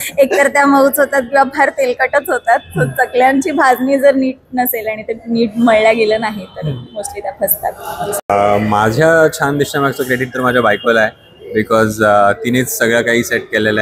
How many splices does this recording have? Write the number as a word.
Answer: one